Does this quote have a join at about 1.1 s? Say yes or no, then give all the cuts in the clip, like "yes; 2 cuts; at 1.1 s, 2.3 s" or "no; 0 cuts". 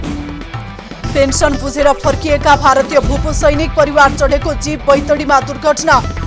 yes; 1 cut; at 1.1 s